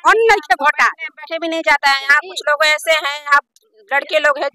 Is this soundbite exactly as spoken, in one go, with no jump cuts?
yes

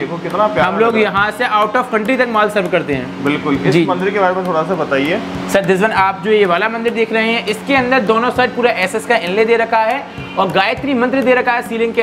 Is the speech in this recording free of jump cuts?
yes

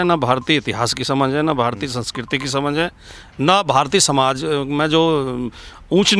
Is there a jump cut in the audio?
no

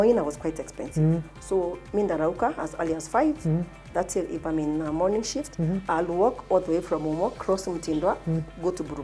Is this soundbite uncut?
yes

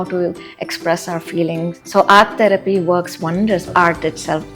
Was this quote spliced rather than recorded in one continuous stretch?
yes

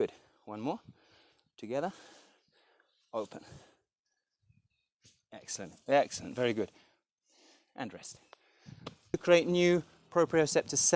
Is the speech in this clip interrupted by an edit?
yes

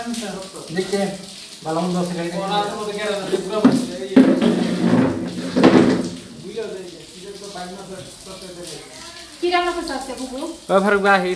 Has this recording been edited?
no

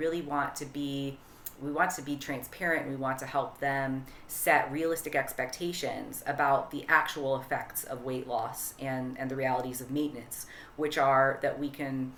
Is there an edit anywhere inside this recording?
no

